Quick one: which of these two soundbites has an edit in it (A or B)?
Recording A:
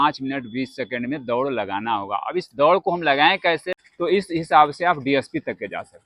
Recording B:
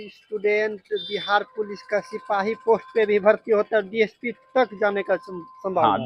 A